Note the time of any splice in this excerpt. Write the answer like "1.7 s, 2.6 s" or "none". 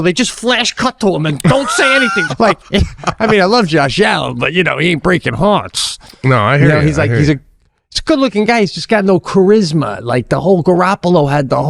2.2 s